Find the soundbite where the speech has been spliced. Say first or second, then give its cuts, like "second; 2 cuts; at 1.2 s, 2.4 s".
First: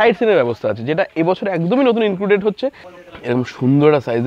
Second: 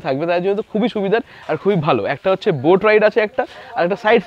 first; 1 cut; at 2.9 s